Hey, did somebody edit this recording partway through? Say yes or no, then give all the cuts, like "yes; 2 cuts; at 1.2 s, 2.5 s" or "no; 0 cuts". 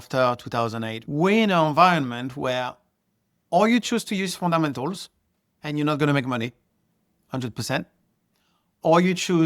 yes; 1 cut; at 1.0 s